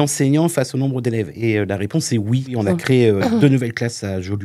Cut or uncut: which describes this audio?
cut